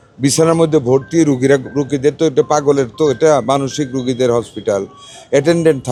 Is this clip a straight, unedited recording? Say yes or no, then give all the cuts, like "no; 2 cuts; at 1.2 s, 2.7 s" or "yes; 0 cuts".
yes; 0 cuts